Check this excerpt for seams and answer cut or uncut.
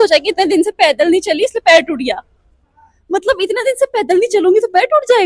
uncut